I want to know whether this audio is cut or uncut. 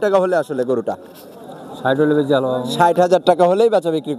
uncut